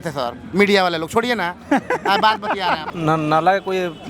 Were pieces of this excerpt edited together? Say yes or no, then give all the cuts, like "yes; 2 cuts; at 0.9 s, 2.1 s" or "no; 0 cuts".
yes; 1 cut; at 2.9 s